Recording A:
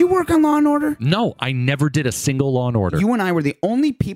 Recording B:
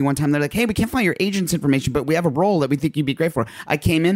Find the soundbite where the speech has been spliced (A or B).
A